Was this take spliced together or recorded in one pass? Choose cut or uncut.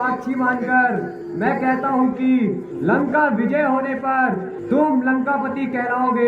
cut